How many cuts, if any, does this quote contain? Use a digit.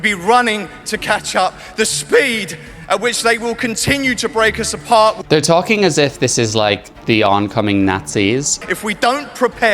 1